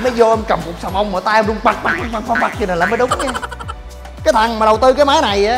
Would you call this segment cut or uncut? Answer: cut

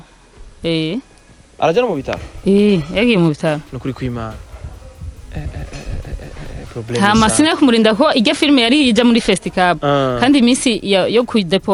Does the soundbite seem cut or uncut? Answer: uncut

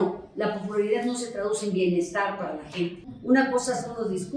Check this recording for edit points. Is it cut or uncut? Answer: cut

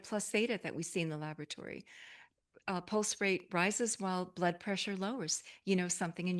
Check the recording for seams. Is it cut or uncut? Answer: uncut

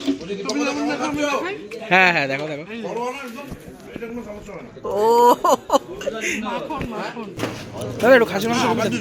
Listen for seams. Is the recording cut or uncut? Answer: cut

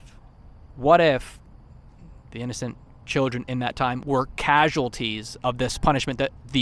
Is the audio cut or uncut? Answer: uncut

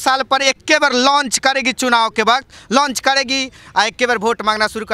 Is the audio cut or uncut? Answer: uncut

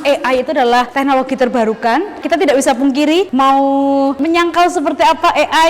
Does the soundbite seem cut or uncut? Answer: cut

